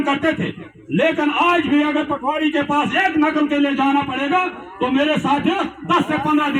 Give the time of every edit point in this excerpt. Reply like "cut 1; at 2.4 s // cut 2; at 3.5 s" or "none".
none